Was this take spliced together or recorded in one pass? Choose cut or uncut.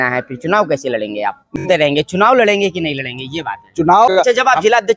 cut